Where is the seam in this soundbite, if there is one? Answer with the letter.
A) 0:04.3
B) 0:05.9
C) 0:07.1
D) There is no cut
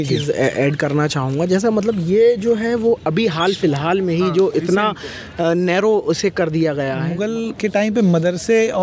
C